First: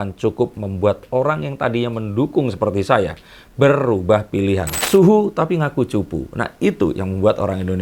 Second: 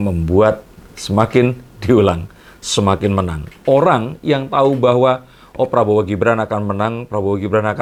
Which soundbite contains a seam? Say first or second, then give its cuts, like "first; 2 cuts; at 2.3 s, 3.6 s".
first; 1 cut; at 4.8 s